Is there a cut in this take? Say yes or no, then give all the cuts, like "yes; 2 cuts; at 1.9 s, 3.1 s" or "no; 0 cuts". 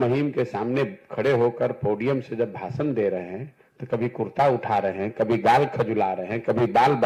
no; 0 cuts